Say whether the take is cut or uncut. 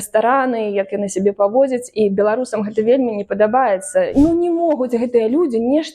cut